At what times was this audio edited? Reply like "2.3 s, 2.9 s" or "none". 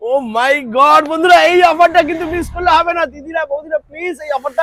none